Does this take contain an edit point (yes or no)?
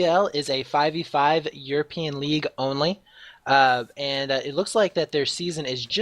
no